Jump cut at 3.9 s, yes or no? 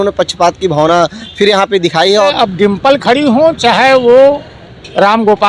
no